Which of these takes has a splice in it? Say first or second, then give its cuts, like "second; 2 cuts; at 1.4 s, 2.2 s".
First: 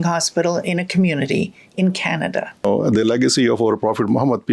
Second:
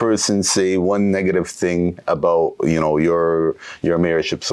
first; 1 cut; at 2.6 s